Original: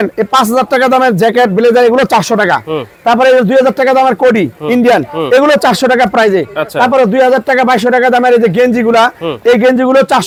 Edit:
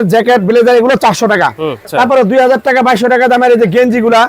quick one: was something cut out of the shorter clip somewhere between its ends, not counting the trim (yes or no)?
yes